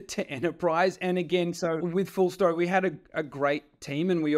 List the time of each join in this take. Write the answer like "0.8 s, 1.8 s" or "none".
1.8 s